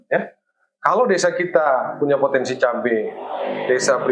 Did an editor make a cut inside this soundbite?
no; 0 cuts

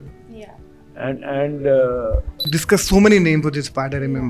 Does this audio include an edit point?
yes; 1 cut; at 2.6 s

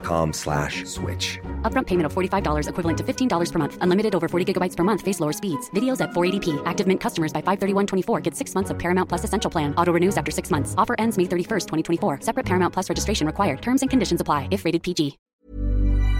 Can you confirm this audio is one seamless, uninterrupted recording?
no; 1 cut; at 15.2 s

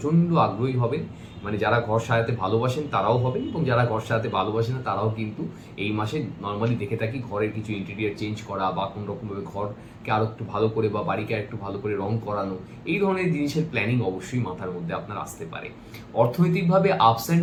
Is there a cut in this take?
no; 0 cuts

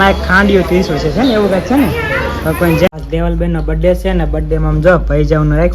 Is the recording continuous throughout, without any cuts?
no; 1 cut; at 2.9 s

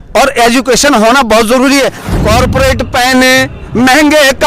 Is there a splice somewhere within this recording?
yes; 1 cut; at 2.0 s

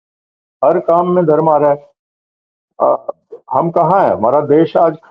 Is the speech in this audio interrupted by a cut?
no; 0 cuts

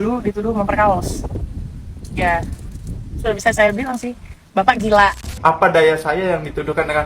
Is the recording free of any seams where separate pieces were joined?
no; 1 cut; at 5.3 s

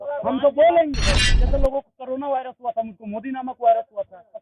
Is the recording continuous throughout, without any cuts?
no; 1 cut; at 1.3 s

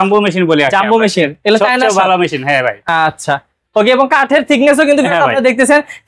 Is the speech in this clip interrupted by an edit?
no; 0 cuts

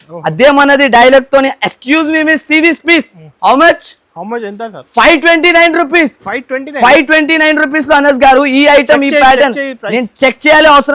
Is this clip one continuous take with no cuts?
yes; 0 cuts

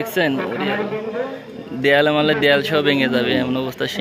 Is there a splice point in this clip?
no; 0 cuts

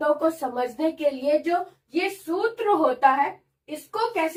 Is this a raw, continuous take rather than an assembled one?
yes; 0 cuts

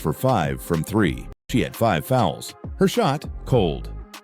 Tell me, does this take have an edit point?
yes; 1 cut; at 1.3 s

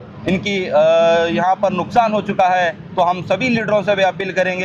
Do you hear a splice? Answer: no; 0 cuts

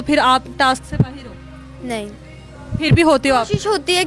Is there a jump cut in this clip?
no; 0 cuts

